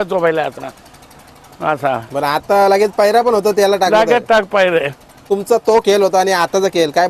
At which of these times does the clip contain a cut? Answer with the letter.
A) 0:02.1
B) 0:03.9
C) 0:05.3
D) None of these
C